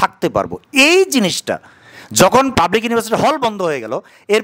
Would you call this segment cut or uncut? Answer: cut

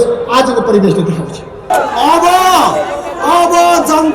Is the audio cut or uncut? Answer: cut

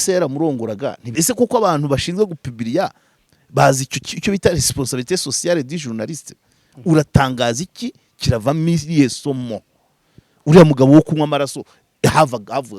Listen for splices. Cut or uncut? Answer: cut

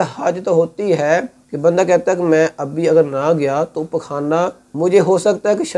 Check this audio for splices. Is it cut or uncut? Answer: cut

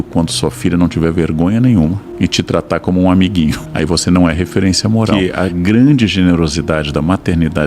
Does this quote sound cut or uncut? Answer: cut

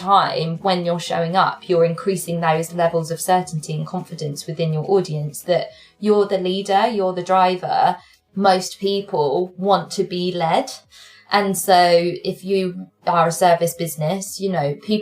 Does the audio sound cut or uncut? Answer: cut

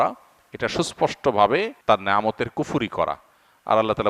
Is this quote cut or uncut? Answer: cut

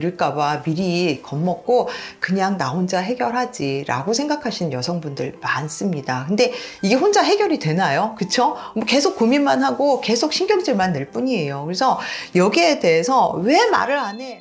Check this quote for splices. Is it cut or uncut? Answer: uncut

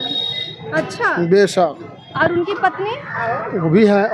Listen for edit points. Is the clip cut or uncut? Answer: uncut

